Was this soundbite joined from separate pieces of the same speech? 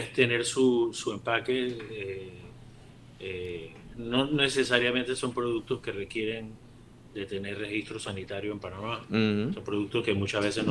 no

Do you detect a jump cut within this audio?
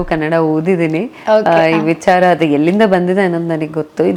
no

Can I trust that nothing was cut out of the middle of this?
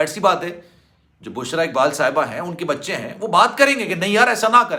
yes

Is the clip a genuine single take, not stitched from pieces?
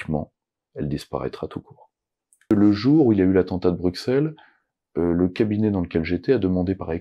no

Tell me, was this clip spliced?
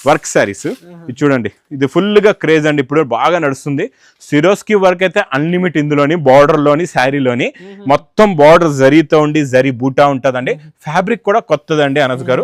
no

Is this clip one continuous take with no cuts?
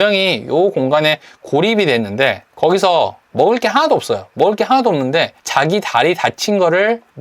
yes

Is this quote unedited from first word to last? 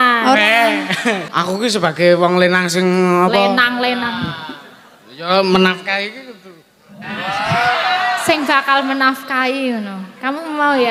no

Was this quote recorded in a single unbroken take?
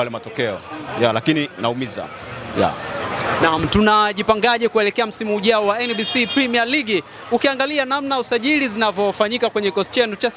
yes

